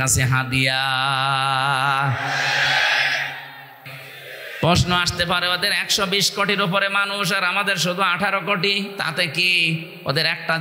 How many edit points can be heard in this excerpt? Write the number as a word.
one